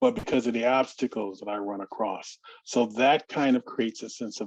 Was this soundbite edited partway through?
no; 0 cuts

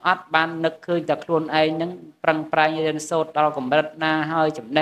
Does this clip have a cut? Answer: no; 0 cuts

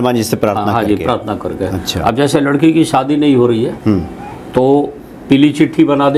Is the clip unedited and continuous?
yes; 0 cuts

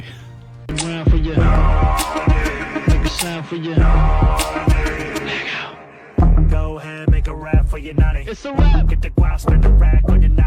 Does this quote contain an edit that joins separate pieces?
no; 0 cuts

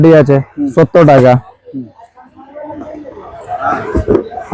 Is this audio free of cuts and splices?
yes; 0 cuts

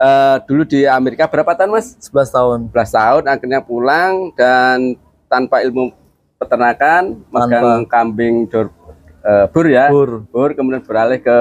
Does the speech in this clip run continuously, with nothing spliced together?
yes; 0 cuts

